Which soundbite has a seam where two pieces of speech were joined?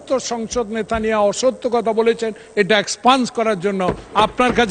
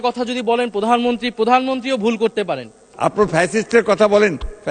second; 1 cut; at 2.8 s

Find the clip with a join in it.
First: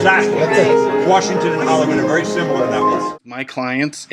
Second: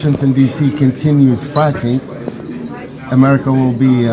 first; 1 cut; at 3.1 s

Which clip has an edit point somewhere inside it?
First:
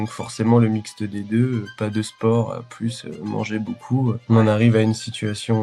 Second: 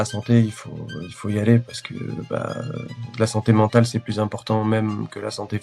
first; 1 cut; at 4.2 s

